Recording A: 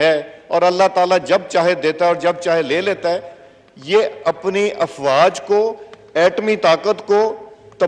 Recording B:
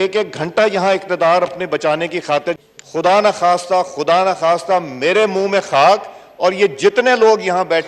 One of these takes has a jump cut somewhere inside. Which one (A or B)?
B